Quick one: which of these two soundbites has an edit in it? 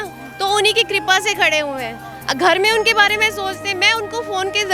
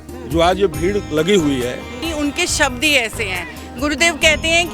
second; 1 cut; at 2.0 s

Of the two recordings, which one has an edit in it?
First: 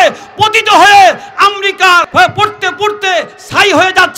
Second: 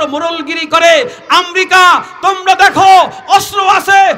first; 1 cut; at 2.1 s

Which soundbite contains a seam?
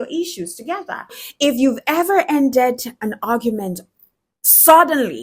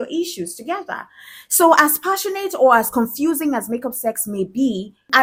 first; 1 cut; at 1.2 s

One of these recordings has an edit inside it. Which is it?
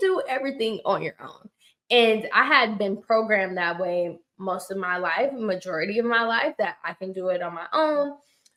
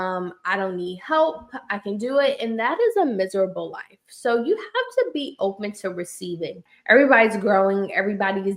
second; 1 cut; at 6.7 s

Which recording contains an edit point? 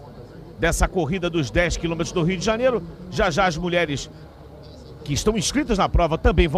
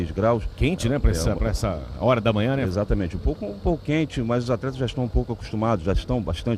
second; 1 cut; at 5.4 s

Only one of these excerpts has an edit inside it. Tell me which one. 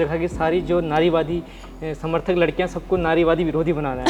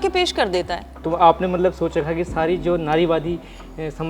second; 1 cut; at 0.9 s

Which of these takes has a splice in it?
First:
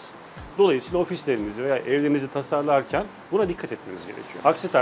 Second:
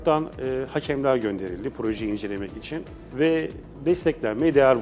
second; 1 cut; at 3.6 s

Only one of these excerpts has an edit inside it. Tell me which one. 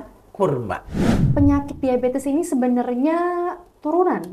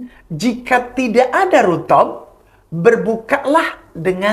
first; 1 cut; at 1.2 s

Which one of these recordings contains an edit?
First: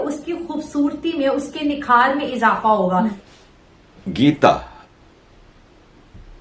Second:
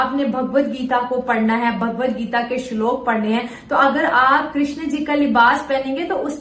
first; 1 cut; at 3.2 s

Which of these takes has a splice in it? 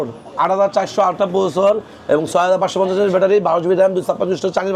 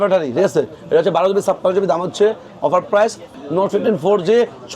second; 1 cut; at 3.3 s

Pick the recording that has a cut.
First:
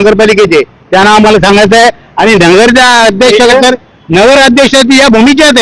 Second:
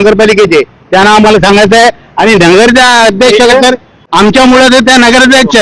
second; 1 cut; at 4.0 s

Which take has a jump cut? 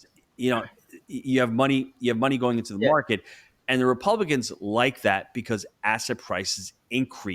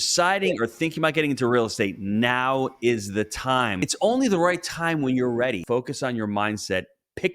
second; 2 cuts; at 3.8 s, 5.6 s

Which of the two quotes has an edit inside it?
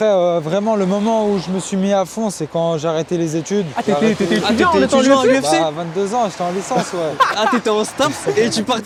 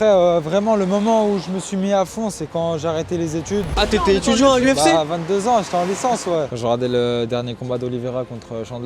second; 2 cuts; at 3.7 s, 6.5 s

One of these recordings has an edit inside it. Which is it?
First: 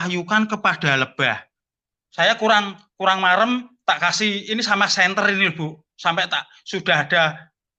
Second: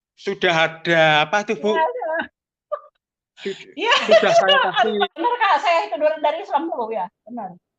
second; 1 cut; at 5.2 s

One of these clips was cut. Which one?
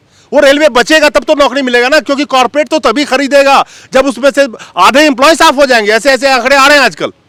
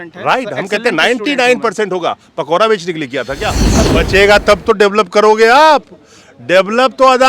second; 1 cut; at 3.8 s

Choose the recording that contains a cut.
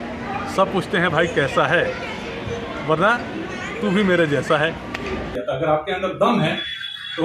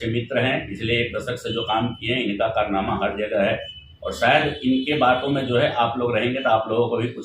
first; 1 cut; at 5.3 s

